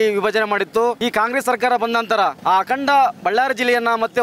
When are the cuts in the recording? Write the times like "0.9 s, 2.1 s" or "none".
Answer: 1.0 s, 2.4 s